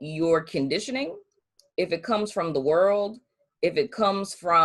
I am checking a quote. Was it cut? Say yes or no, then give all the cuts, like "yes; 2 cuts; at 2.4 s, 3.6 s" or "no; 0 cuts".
no; 0 cuts